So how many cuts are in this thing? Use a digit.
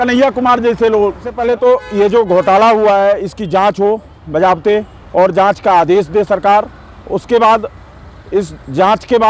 1